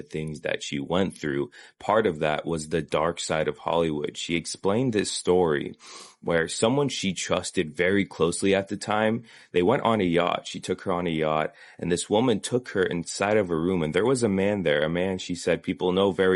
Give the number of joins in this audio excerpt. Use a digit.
0